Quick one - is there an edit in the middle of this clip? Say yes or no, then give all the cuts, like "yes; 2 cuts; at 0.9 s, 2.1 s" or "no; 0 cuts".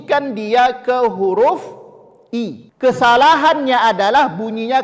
yes; 1 cut; at 2.6 s